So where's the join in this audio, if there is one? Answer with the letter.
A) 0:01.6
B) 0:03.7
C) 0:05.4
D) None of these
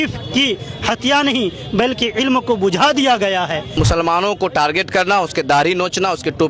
B